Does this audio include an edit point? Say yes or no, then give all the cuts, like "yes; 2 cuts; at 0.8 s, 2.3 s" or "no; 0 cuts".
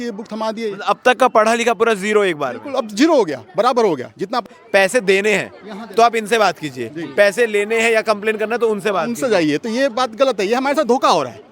yes; 1 cut; at 4.5 s